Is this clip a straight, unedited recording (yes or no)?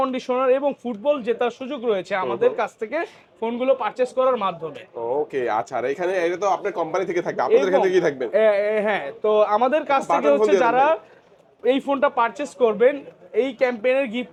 yes